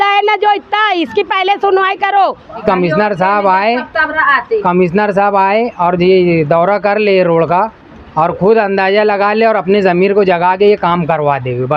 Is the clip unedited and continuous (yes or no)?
no